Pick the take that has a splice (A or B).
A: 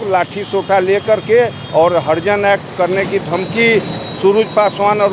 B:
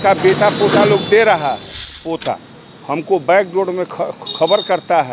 B